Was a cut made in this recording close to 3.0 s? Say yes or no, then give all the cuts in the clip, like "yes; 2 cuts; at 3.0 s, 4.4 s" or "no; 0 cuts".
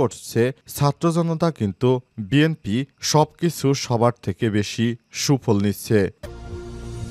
no; 1 cut; at 6.2 s